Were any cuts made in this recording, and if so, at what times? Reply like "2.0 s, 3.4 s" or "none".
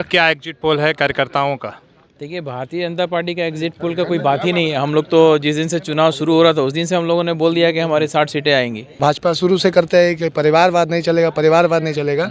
9.0 s